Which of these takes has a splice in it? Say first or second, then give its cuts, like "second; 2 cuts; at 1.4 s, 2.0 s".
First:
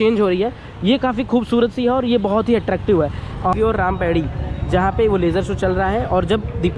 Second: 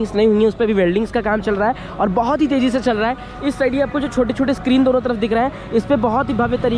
first; 1 cut; at 3.6 s